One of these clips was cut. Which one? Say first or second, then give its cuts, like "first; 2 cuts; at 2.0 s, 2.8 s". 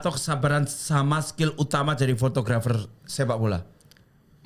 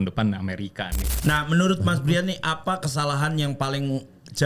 second; 1 cut; at 1.2 s